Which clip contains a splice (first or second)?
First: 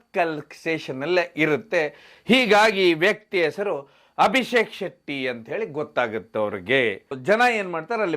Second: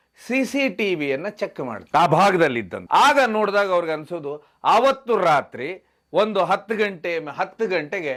first